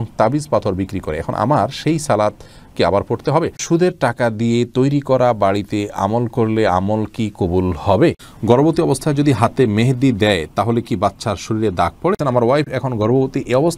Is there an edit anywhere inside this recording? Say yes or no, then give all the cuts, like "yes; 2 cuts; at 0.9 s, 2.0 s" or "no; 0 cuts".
yes; 3 cuts; at 3.6 s, 8.3 s, 12.2 s